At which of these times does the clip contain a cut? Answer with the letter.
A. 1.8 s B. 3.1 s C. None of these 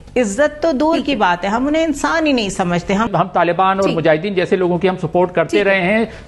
B